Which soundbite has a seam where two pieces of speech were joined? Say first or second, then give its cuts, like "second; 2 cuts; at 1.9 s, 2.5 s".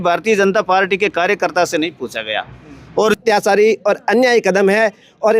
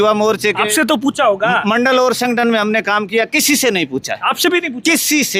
first; 1 cut; at 3.2 s